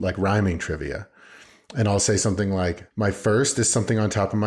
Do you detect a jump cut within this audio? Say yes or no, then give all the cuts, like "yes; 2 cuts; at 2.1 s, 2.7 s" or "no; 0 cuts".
yes; 1 cut; at 2.8 s